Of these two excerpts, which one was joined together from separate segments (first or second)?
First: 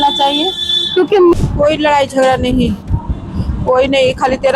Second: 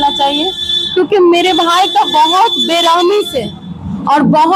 first